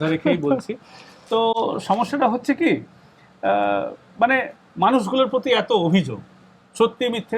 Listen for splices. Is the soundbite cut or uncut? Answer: uncut